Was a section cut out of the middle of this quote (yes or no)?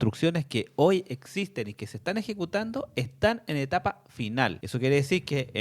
yes